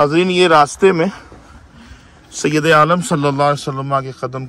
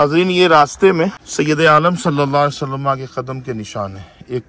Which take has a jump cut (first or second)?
second